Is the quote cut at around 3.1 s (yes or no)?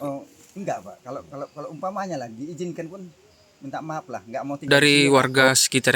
no